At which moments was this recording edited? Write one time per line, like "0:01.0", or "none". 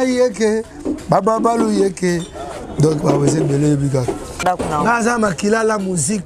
0:04.4